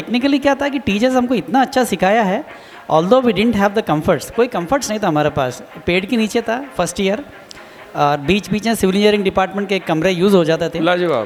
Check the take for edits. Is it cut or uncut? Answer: uncut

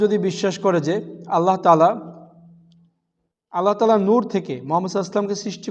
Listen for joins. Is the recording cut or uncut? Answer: uncut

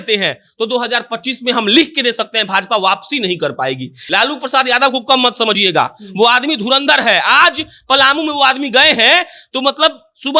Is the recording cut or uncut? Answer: cut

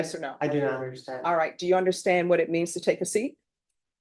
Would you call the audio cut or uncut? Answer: uncut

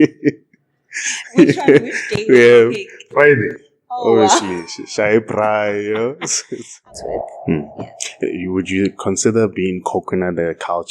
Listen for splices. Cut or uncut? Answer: cut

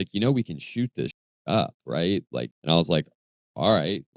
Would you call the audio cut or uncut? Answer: cut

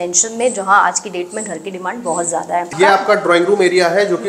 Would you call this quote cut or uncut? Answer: cut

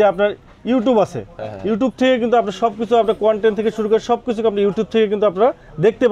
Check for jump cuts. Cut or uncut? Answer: uncut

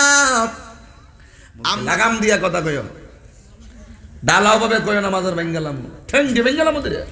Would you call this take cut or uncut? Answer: cut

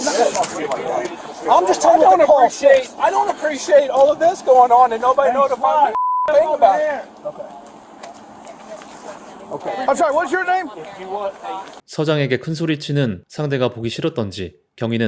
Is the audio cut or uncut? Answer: uncut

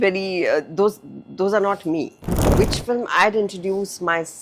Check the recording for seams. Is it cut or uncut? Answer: cut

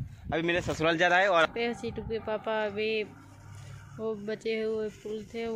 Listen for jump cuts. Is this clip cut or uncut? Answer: cut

